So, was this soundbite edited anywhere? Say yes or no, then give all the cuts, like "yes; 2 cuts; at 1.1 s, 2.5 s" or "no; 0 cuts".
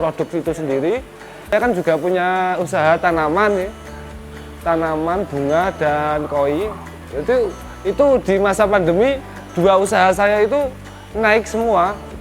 yes; 1 cut; at 1.5 s